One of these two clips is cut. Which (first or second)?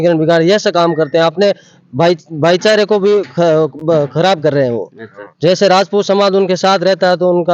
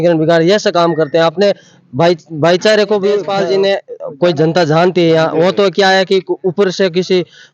second